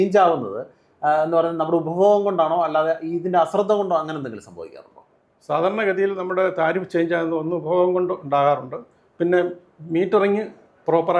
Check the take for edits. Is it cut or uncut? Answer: uncut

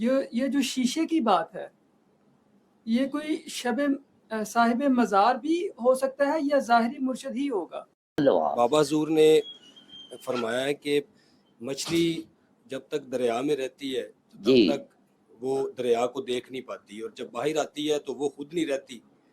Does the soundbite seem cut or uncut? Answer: cut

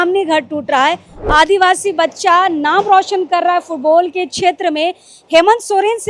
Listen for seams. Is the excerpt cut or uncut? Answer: cut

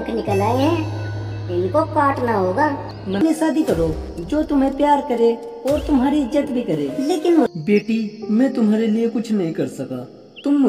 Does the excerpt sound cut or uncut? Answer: cut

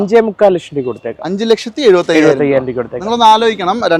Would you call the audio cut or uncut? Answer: uncut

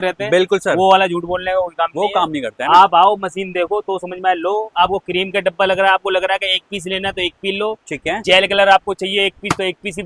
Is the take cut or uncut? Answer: uncut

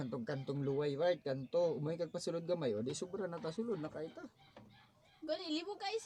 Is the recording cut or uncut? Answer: uncut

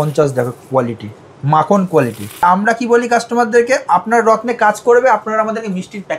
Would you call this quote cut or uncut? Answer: cut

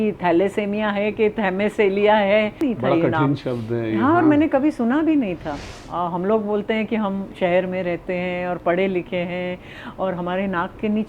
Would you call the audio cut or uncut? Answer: cut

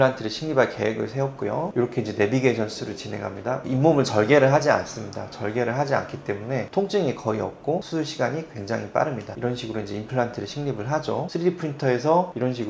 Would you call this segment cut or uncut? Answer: cut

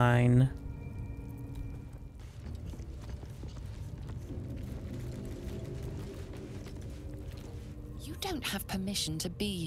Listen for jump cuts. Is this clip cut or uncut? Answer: cut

